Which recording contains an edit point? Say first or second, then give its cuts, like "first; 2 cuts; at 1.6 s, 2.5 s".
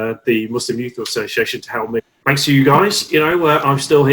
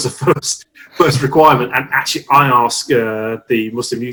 first; 1 cut; at 2.1 s